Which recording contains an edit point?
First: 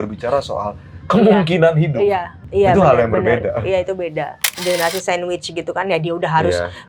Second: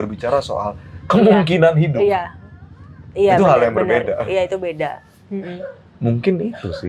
first; 2 cuts; at 2.4 s, 4.5 s

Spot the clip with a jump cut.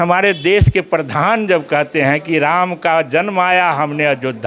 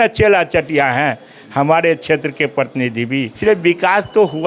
second; 1 cut; at 3.3 s

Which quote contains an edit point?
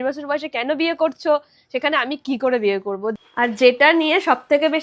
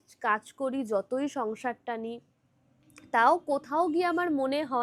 first; 1 cut; at 3.2 s

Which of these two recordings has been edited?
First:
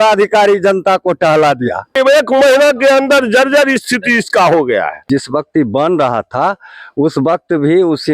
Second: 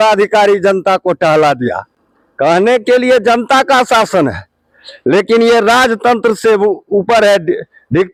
first; 2 cuts; at 1.9 s, 5.0 s

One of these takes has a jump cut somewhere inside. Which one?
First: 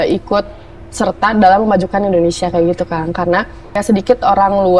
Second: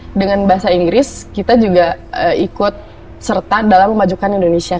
first; 1 cut; at 3.8 s

